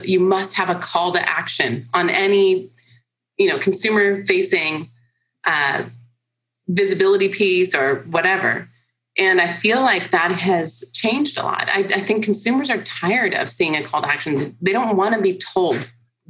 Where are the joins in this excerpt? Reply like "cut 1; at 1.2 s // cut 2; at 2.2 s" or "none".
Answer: none